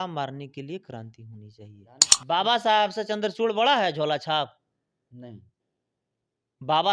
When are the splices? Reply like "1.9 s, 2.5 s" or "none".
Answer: 2.1 s